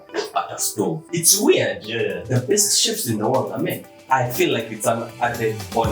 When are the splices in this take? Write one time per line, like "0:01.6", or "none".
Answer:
0:01.0
0:03.9